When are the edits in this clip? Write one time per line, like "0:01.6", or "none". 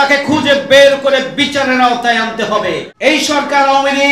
0:02.9